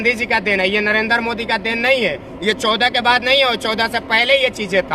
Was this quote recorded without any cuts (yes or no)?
yes